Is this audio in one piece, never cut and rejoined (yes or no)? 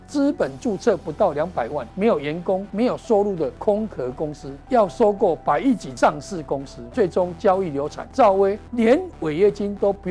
no